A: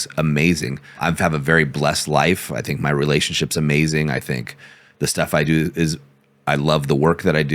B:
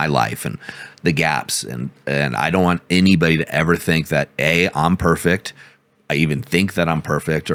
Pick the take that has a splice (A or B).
A